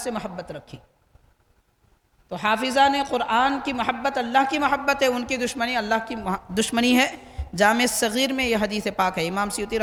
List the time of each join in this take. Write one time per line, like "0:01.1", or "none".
none

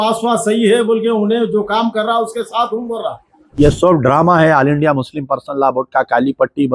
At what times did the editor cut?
0:03.4

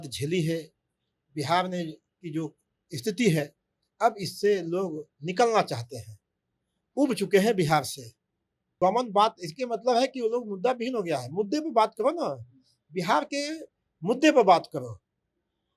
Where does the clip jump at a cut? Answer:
0:08.6

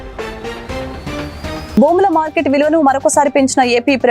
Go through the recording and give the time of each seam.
none

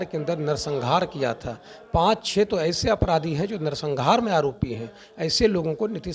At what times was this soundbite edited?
none

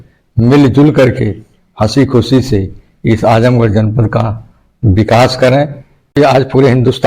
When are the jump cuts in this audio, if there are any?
0:06.2

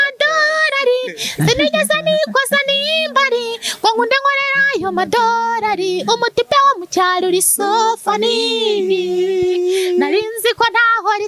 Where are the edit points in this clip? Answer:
none

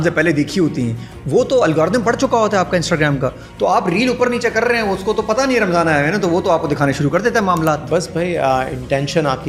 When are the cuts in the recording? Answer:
none

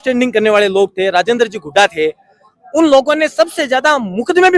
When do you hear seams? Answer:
none

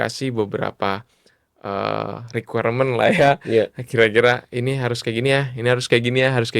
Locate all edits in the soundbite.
none

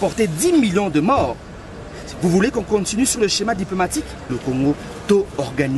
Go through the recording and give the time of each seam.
0:04.4

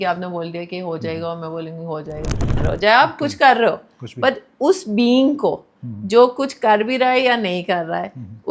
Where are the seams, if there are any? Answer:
0:02.6

